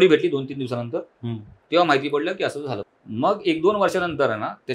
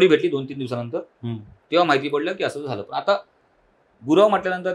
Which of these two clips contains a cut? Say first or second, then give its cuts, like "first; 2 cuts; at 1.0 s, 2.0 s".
first; 1 cut; at 2.8 s